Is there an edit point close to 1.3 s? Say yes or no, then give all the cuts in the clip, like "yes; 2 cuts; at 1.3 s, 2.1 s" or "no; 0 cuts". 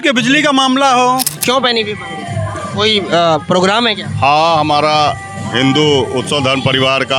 yes; 1 cut; at 1.3 s